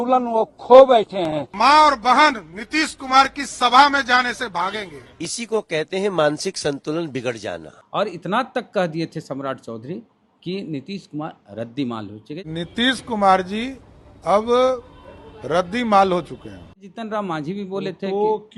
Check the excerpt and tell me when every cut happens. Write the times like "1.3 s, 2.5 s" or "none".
none